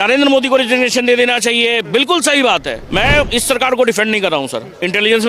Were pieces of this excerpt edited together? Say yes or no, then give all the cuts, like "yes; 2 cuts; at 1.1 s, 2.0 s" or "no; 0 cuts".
yes; 1 cut; at 2.8 s